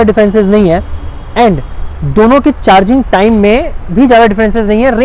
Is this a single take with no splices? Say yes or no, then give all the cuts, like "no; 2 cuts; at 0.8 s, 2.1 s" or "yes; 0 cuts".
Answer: yes; 0 cuts